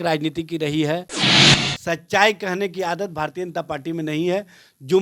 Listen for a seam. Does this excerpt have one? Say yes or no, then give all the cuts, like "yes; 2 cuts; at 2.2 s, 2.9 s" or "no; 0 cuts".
yes; 1 cut; at 1.4 s